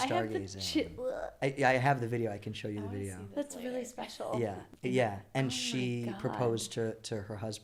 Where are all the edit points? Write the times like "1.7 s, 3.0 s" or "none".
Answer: none